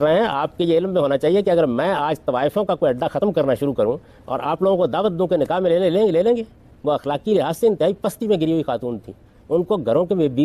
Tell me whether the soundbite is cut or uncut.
uncut